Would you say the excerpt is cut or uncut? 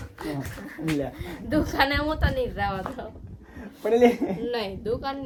uncut